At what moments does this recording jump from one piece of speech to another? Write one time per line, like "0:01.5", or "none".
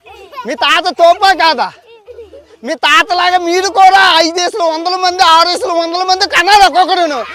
none